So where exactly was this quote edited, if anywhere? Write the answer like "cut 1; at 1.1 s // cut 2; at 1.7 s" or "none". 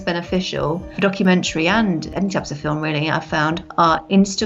cut 1; at 0.9 s // cut 2; at 3.7 s

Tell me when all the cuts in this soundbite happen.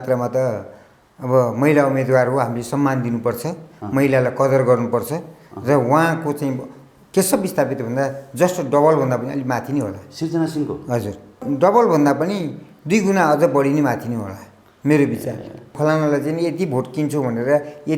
cut 1; at 11.4 s // cut 2; at 15.7 s

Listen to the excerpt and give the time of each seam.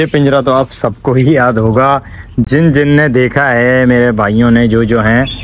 none

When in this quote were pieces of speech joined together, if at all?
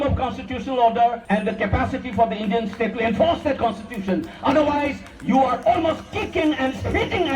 cut 1; at 1.2 s

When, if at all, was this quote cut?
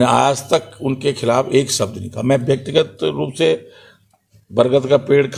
none

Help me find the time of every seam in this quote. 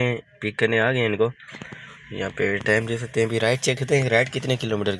none

